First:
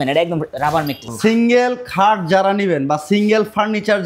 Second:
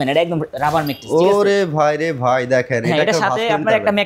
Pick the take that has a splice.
first; 1 cut; at 1.1 s

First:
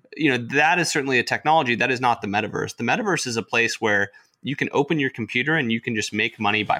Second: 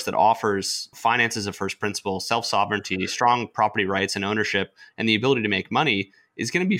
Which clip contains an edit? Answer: second; 1 cut; at 0.9 s

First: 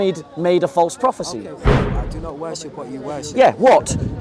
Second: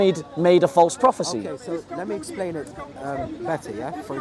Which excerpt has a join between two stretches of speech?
first; 1 cut; at 1.8 s

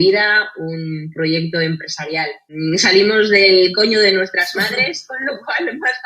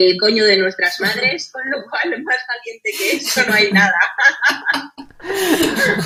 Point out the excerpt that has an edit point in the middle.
first; 1 cut; at 2.5 s

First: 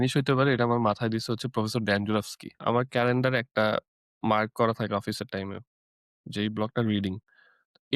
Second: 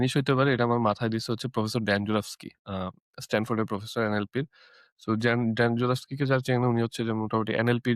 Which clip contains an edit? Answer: first; 1 cut; at 2.6 s

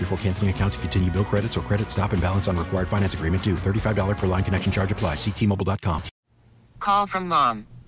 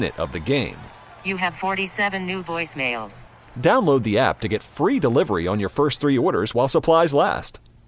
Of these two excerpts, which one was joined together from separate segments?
first; 1 cut; at 6.2 s

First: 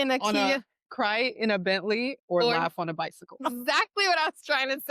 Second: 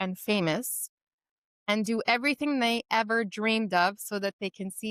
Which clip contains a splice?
first; 1 cut; at 3.4 s

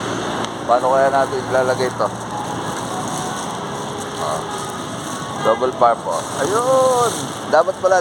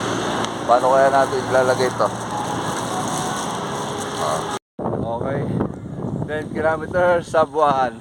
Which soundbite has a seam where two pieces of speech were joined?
second; 1 cut; at 4.6 s

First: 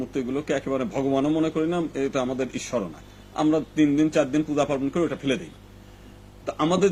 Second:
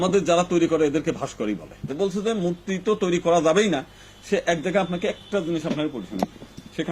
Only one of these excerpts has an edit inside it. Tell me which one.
second; 1 cut; at 1.9 s

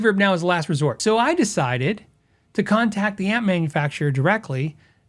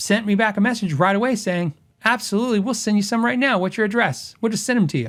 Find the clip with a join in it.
first; 1 cut; at 1.0 s

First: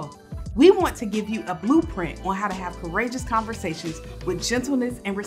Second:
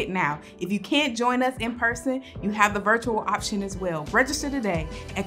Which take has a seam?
second; 1 cut; at 4.0 s

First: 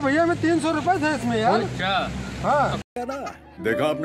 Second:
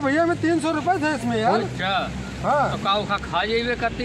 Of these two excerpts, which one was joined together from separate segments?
second; 1 cut; at 2.8 s

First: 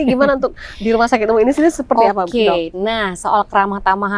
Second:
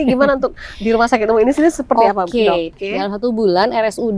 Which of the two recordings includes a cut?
second; 1 cut; at 2.8 s

